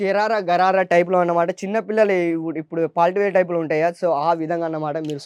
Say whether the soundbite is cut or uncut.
uncut